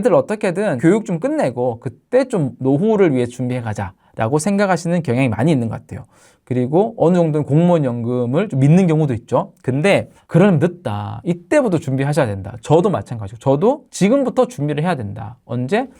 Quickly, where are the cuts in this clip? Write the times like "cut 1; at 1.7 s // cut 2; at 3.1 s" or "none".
cut 1; at 0.8 s // cut 2; at 2.5 s